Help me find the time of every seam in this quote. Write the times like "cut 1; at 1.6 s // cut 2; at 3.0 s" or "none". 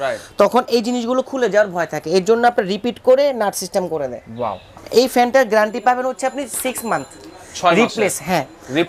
cut 1; at 4.7 s